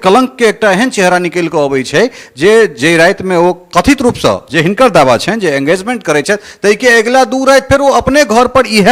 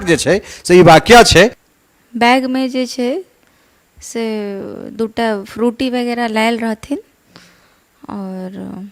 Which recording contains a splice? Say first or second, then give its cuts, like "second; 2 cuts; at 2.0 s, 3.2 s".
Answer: second; 1 cut; at 1.7 s